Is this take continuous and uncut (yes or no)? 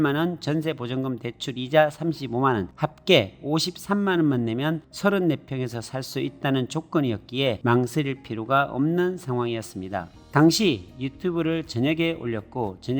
no